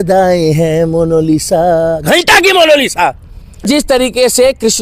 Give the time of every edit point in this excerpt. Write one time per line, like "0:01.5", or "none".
0:03.6